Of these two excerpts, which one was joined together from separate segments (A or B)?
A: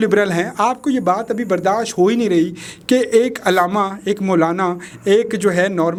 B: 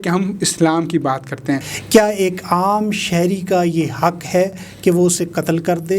B